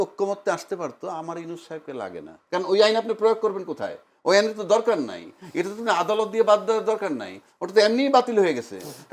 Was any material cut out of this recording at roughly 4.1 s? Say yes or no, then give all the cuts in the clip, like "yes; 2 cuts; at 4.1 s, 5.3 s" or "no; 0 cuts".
no; 1 cut; at 2.3 s